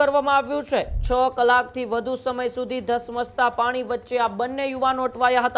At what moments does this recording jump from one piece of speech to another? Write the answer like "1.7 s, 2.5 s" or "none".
1.0 s